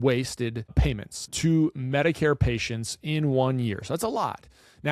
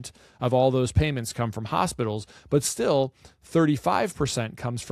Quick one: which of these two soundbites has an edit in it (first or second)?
first